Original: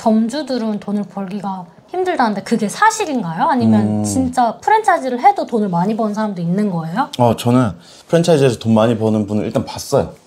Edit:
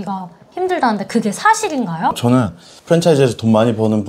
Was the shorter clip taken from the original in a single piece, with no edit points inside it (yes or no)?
no